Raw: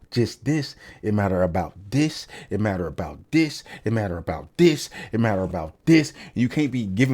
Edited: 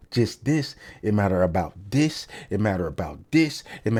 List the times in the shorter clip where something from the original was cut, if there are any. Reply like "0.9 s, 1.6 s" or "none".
none

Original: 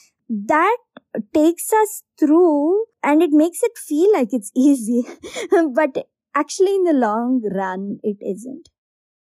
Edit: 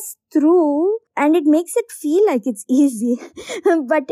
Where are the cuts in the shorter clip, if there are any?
none

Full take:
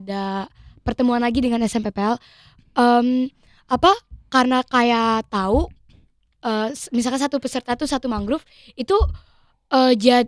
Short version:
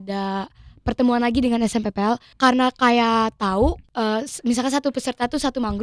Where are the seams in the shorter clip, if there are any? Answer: 2.3 s, 3.8 s

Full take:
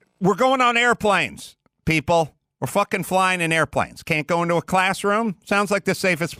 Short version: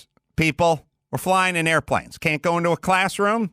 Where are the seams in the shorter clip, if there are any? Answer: 1.2 s

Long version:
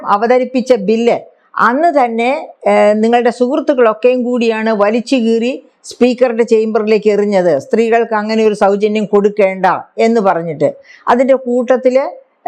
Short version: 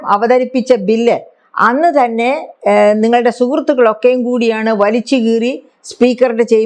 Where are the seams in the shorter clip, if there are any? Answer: none

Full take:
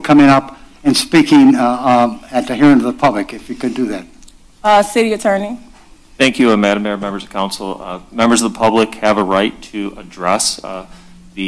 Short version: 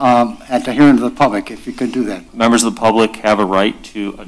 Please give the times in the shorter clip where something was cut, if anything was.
2.2 s

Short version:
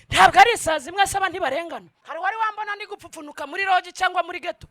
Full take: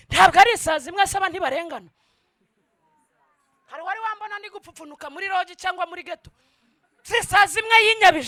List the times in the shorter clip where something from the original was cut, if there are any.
2.0 s

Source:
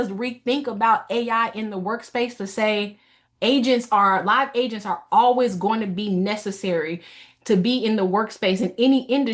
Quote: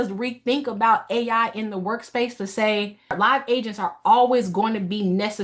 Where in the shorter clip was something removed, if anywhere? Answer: 3.2 s

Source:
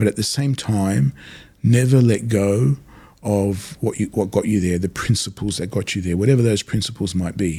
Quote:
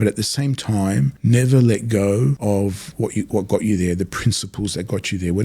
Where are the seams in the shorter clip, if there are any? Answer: 1.2 s, 2.4 s

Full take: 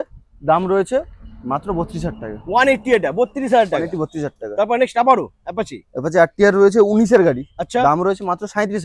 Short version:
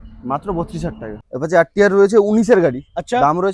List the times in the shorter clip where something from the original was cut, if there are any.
1.2 s

